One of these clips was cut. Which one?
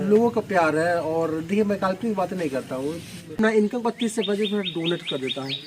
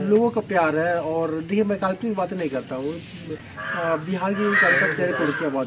first; 1 cut; at 3.4 s

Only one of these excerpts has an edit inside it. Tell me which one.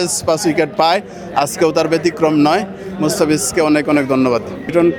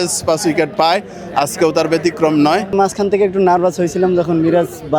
second; 1 cut; at 2.7 s

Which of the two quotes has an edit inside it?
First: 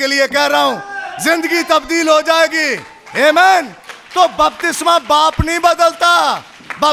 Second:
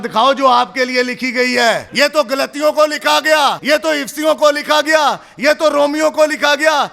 second; 2 cuts; at 1.9 s, 3.6 s

